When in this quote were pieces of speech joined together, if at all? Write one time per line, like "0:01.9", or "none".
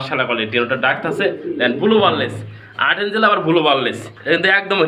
none